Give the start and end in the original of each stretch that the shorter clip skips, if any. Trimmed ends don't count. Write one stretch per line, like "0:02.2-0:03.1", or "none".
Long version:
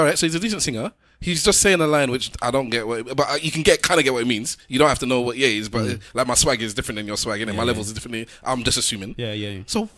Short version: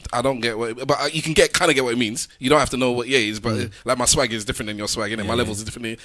none